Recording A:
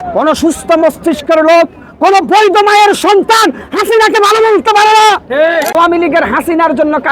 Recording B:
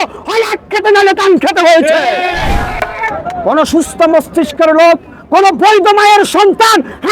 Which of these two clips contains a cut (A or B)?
A